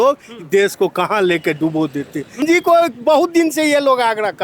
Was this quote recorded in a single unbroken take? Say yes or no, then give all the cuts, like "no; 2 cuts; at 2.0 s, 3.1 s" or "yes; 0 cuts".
no; 1 cut; at 2.4 s